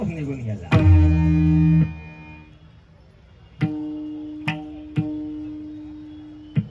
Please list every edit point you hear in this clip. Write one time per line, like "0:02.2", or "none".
none